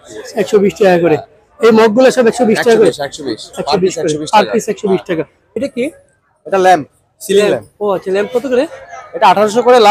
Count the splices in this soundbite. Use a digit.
1